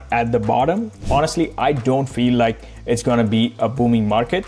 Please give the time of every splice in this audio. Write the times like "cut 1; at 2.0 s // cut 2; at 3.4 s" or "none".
cut 1; at 1.0 s

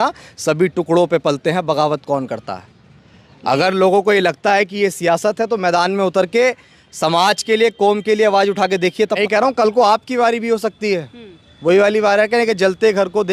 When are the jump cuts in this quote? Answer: cut 1; at 9.2 s

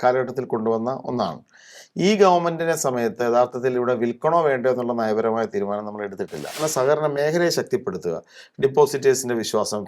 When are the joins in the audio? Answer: cut 1; at 6.6 s

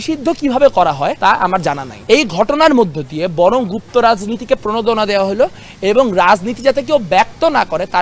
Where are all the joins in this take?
cut 1; at 1.4 s

